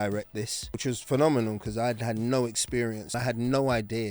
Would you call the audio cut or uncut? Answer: cut